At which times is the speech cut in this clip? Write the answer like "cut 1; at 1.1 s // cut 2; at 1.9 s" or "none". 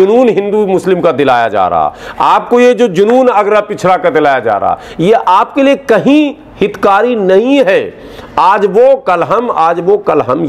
none